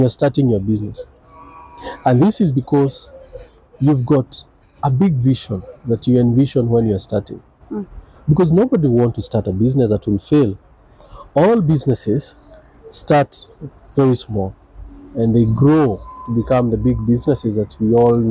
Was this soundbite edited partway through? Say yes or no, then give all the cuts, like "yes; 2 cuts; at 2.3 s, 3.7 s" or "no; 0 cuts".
yes; 1 cut; at 10.7 s